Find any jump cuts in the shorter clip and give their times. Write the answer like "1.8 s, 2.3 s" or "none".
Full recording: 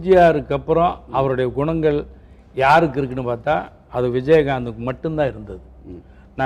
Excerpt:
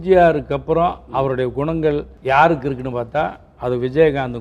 2.1 s